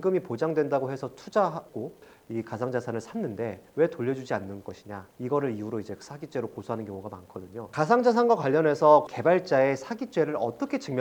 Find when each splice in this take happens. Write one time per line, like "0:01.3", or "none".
0:02.1
0:07.6